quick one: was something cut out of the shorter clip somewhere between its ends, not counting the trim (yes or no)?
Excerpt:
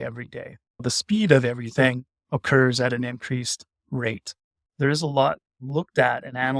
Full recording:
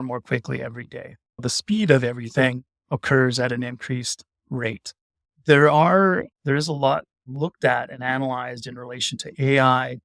yes